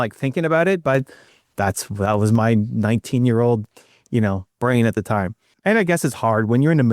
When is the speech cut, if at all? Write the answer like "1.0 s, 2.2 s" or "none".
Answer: 5.4 s